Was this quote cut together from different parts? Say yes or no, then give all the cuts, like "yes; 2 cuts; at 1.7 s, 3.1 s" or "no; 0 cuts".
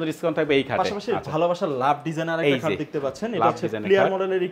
no; 0 cuts